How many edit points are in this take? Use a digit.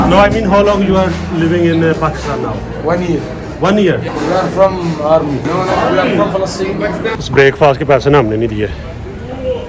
3